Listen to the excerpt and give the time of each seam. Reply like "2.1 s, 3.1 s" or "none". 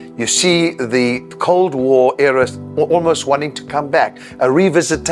3.9 s